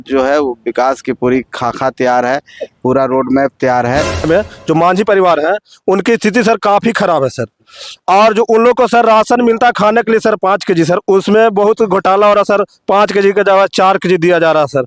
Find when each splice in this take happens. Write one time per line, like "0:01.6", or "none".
0:04.2

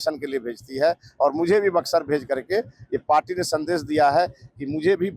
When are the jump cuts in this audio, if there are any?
none

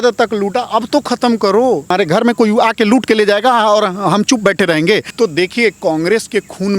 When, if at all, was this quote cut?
0:01.9
0:05.1

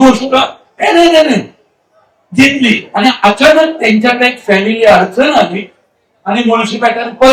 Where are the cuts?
none

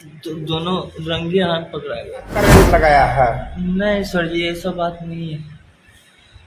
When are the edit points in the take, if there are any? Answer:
0:02.4

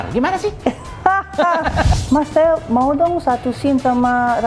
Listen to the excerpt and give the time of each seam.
0:01.9

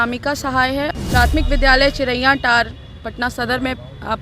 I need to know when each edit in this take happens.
0:00.9

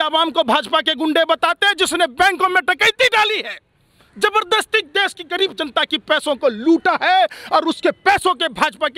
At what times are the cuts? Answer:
none

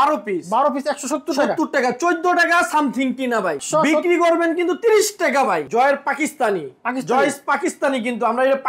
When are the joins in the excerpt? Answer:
0:03.6
0:05.6

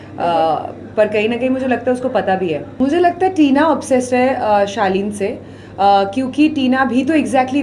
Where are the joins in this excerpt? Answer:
0:02.7

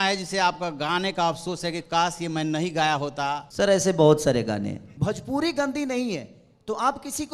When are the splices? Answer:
0:03.5
0:04.9

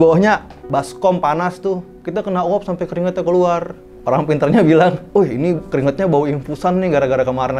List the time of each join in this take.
0:01.9
0:04.0

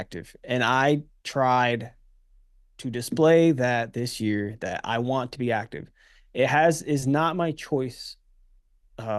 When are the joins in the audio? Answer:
none

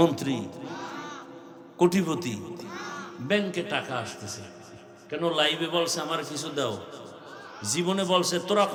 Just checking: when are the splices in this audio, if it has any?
none

